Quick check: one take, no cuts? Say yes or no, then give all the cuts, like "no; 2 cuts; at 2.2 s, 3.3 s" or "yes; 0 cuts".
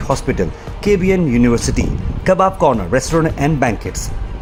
yes; 0 cuts